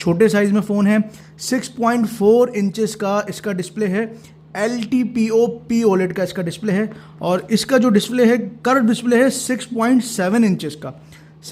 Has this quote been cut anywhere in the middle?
no; 0 cuts

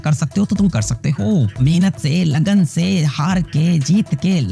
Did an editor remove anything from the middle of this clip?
yes; 1 cut; at 1.6 s

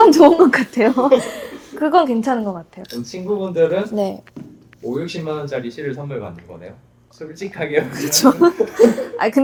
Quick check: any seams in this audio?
no; 0 cuts

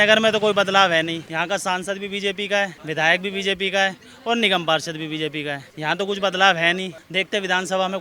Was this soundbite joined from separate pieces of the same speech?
yes; 4 cuts; at 1.3 s, 2.8 s, 5.7 s, 7.0 s

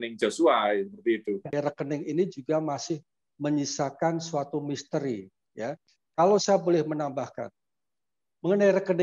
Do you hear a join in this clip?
yes; 1 cut; at 1.5 s

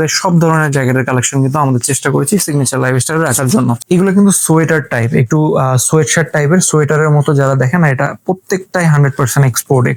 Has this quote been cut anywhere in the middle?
no; 0 cuts

